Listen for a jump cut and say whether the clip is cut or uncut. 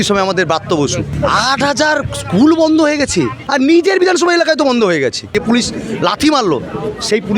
cut